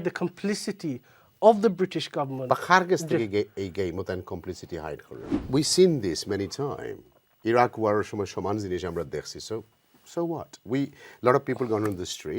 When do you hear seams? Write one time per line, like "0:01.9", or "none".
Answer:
0:05.4